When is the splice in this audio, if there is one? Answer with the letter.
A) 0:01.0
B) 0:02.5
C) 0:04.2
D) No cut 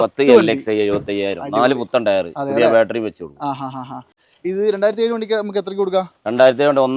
C